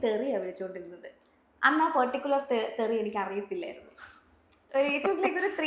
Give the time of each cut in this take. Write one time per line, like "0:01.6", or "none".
none